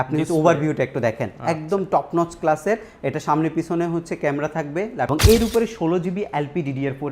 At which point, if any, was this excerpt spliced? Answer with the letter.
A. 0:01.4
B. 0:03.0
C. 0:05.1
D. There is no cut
C